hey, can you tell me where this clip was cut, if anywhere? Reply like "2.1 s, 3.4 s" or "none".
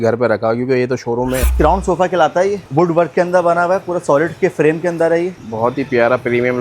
1.5 s, 2.6 s, 5.4 s